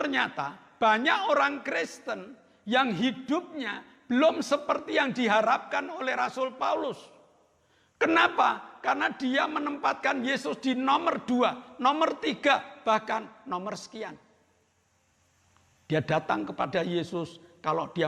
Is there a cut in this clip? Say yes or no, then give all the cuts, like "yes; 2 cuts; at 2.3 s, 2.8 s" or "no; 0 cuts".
no; 0 cuts